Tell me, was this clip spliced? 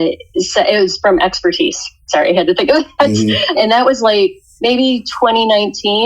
yes; 2 cuts; at 3.6 s, 4.5 s

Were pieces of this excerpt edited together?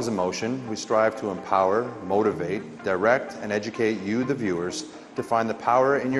yes; 1 cut; at 3.9 s

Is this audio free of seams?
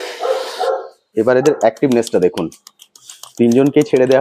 yes; 0 cuts

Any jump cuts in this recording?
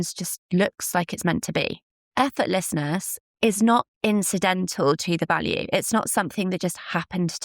yes; 1 cut; at 2.1 s

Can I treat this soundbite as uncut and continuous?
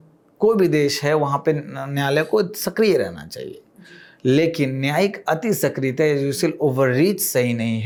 yes; 0 cuts

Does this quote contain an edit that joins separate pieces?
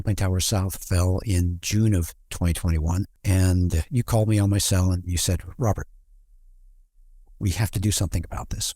yes; 1 cut; at 3.2 s

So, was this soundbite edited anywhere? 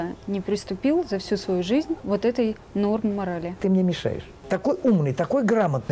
yes; 2 cuts; at 2.0 s, 3.8 s

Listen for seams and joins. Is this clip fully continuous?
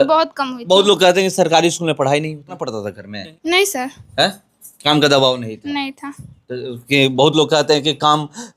no; 1 cut; at 2.5 s

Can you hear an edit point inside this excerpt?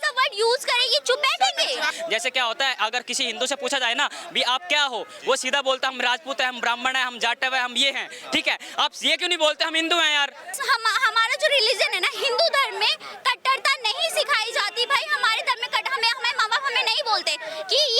yes; 2 cuts; at 1.9 s, 10.6 s

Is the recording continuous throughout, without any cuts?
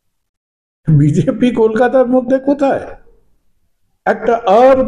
yes; 0 cuts

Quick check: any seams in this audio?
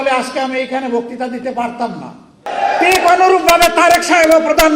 yes; 1 cut; at 2.4 s

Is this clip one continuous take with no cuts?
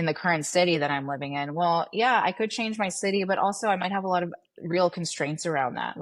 yes; 0 cuts

